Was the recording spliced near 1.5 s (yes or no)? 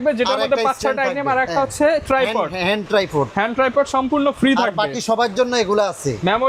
no